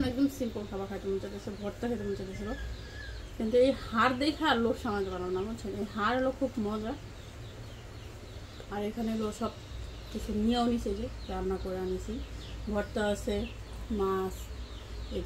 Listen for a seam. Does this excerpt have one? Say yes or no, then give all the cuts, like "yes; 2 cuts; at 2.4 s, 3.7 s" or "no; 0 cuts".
no; 0 cuts